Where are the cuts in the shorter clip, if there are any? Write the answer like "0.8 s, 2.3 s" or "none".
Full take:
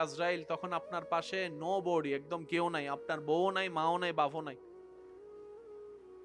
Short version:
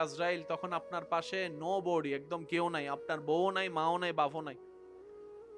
4.6 s